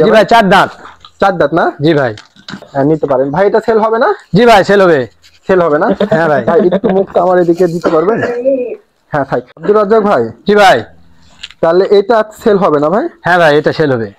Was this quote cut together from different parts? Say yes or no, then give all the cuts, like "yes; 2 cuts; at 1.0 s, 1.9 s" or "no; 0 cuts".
yes; 2 cuts; at 2.7 s, 9.5 s